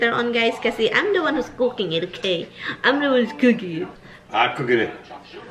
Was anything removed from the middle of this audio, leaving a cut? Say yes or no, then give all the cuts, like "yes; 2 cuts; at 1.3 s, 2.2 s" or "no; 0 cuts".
yes; 1 cut; at 4.0 s